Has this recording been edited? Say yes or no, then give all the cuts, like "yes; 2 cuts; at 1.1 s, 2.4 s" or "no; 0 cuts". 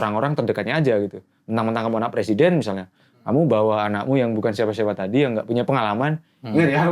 no; 0 cuts